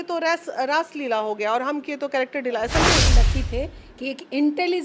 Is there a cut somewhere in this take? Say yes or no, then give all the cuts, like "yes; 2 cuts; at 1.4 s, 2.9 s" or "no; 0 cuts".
yes; 1 cut; at 3.1 s